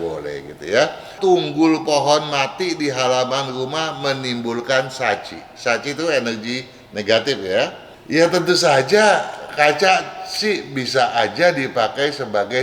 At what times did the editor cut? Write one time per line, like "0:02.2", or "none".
0:01.1
0:07.9

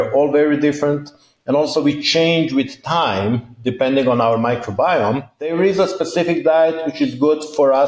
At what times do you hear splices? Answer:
0:05.5

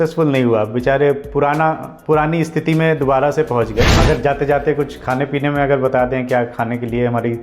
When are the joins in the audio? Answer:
0:04.0

